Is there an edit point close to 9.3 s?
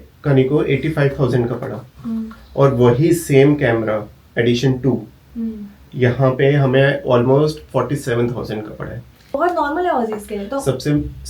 yes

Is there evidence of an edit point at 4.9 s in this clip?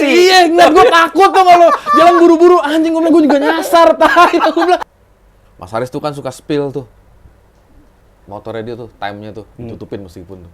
yes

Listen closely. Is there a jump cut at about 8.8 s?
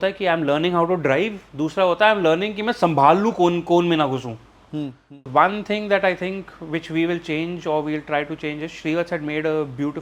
no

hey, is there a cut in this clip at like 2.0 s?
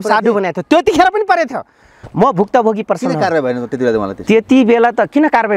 no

